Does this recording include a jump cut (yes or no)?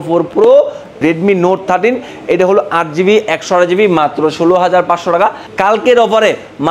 yes